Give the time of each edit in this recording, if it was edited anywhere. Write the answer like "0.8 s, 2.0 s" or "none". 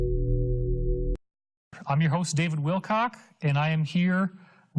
1.1 s